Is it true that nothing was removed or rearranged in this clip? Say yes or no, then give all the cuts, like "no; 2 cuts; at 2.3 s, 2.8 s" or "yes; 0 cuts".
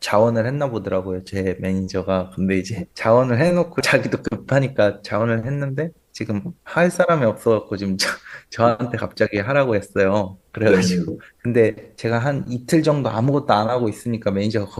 yes; 0 cuts